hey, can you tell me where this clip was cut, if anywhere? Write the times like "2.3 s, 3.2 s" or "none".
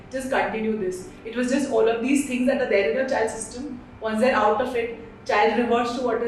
none